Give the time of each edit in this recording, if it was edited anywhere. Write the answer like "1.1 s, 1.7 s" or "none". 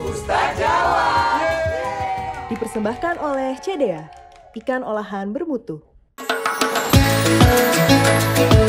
none